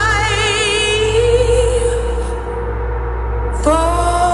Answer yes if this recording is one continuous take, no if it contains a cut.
yes